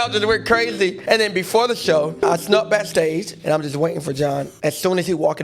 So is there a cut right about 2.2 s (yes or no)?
yes